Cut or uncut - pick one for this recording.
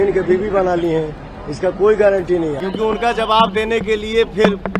cut